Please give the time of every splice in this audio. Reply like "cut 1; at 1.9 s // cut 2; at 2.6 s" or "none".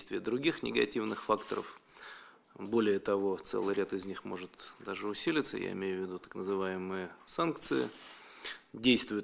cut 1; at 5.2 s